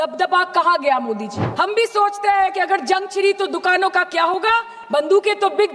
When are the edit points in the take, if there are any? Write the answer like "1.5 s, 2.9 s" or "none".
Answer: 1.4 s